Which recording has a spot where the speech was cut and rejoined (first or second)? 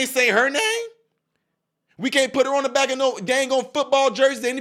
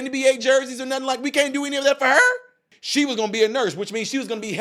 second